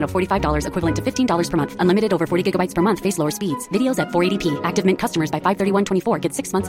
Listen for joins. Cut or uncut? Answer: uncut